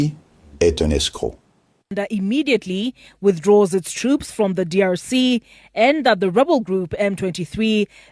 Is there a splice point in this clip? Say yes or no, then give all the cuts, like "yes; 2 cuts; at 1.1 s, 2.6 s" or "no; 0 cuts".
yes; 1 cut; at 2.0 s